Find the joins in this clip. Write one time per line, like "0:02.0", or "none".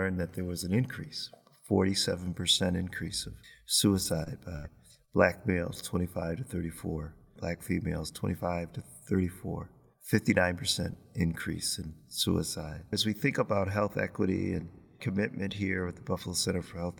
0:07.4
0:13.0

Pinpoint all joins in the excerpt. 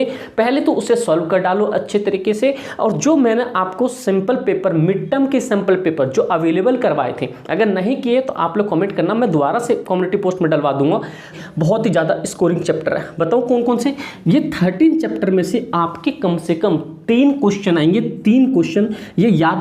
0:11.3

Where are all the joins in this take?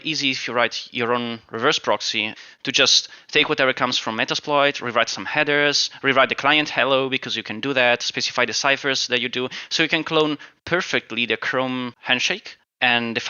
0:12.1

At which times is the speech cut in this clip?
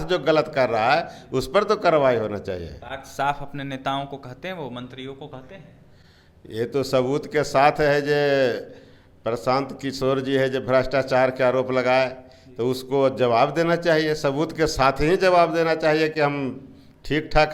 none

